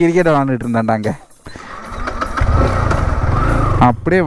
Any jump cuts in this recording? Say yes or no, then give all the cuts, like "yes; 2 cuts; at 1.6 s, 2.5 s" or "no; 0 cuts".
no; 0 cuts